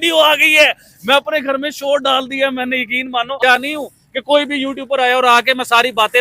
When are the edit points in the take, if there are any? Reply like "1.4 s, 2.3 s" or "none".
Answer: 3.4 s